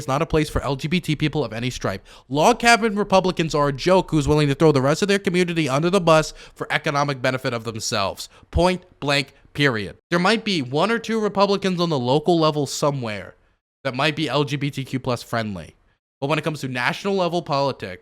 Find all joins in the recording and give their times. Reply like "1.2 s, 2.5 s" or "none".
10.0 s